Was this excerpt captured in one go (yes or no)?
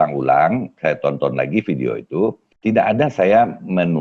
no